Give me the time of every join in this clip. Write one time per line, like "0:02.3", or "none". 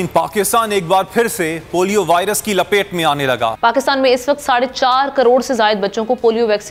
none

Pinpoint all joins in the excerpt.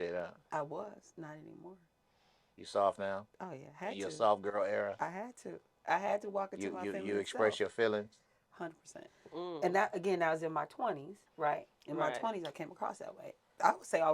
0:09.1

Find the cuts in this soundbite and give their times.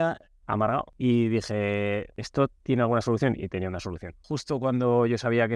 0:00.9
0:02.2
0:04.3

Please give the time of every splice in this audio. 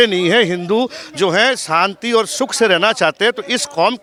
none

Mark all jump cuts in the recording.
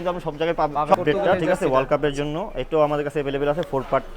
0:00.9

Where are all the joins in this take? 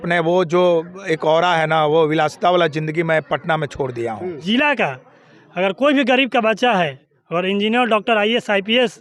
0:04.4

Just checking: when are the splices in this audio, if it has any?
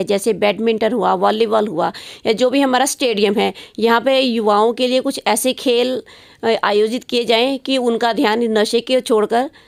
none

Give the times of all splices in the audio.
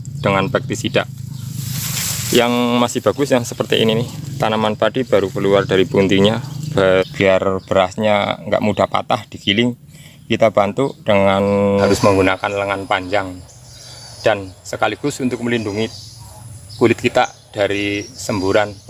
0:07.1
0:11.9

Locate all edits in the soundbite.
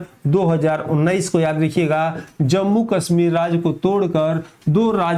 none

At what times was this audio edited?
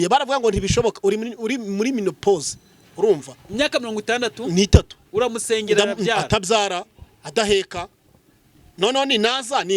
none

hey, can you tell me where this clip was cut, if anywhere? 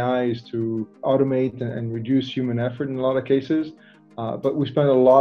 none

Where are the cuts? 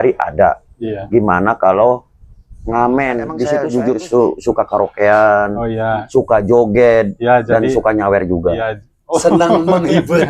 0:03.5

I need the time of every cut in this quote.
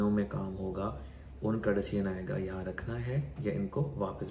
none

